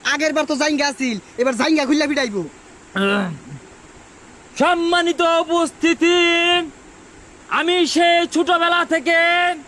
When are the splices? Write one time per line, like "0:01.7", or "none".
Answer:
none